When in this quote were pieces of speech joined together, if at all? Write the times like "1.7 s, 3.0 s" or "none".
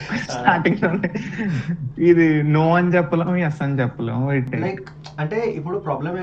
4.5 s